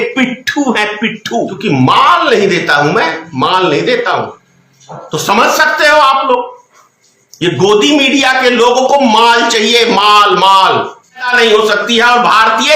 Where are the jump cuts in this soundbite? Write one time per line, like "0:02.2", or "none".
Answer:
0:01.5
0:11.3